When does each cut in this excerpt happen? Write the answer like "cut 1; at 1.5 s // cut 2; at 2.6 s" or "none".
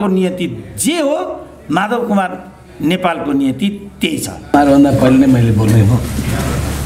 cut 1; at 4.5 s